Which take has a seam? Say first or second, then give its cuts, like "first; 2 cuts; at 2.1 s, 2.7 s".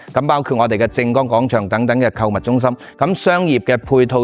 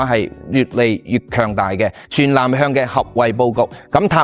second; 1 cut; at 2.0 s